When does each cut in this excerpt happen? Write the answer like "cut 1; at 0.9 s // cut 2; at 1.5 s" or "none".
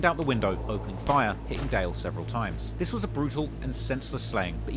none